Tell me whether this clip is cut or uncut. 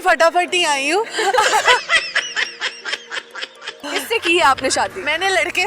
cut